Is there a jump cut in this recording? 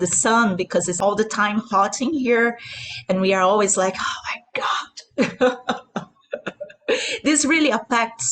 yes; 1 cut; at 0.9 s

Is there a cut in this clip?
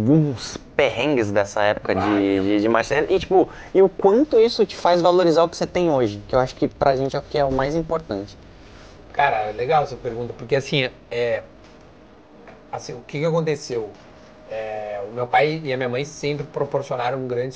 no; 0 cuts

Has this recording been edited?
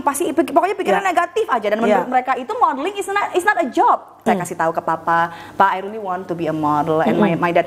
yes; 1 cut; at 4.2 s

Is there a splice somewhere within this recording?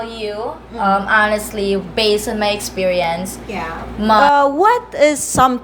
yes; 1 cut; at 4.2 s

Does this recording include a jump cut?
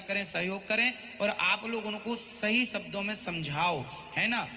no; 0 cuts

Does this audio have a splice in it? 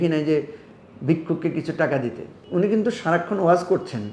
yes; 1 cut; at 2.3 s

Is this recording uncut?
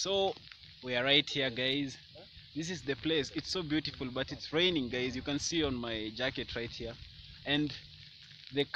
yes; 0 cuts

